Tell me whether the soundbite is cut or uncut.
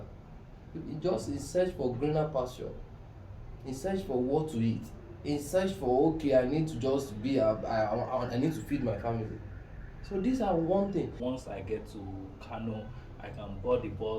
cut